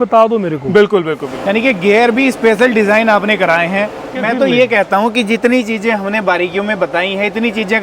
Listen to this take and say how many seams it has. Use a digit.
2